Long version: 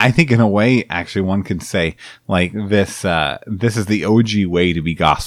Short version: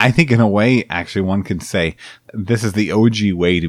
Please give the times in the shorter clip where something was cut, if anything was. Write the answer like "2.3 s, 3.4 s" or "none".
2.2 s